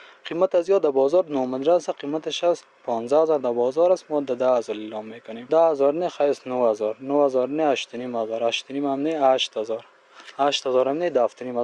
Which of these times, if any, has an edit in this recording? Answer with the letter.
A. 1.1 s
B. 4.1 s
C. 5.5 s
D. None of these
C